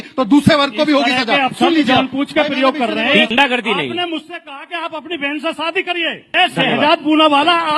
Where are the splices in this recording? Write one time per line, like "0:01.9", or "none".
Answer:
0:03.3
0:06.3